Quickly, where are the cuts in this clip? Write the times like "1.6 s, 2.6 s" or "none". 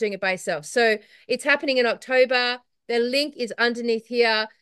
none

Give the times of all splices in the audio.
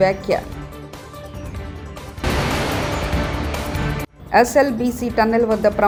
none

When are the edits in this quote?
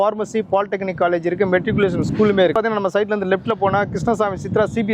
2.5 s

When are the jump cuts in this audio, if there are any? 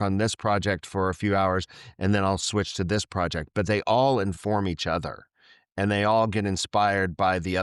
none

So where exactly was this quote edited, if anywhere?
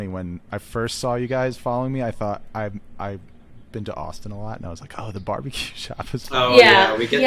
none

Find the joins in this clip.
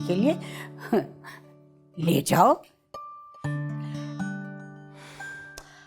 none

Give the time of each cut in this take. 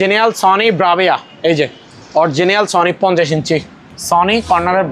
none

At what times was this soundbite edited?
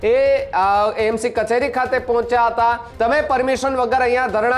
2.9 s

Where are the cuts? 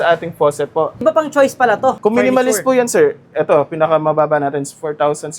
1.0 s, 2.0 s

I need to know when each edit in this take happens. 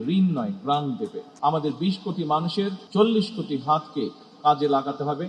1.2 s

